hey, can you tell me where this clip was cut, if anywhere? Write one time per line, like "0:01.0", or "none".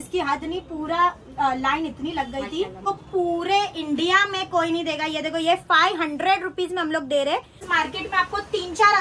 0:02.8
0:07.6